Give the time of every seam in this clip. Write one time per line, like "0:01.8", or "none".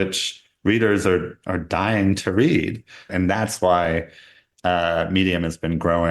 0:03.1